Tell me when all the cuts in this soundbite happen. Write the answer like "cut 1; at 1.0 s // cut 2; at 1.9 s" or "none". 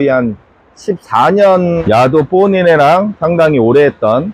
cut 1; at 1.8 s